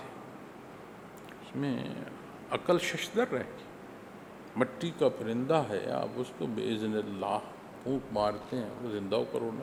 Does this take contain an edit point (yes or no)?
no